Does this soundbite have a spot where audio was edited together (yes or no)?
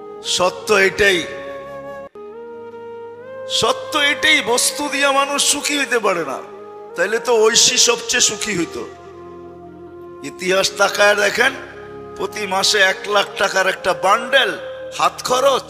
yes